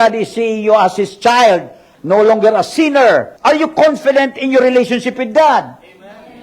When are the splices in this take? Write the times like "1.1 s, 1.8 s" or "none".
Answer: 3.3 s